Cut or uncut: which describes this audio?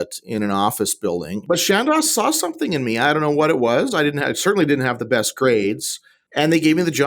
cut